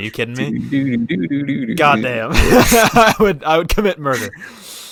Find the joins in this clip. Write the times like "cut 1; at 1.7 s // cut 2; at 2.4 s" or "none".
none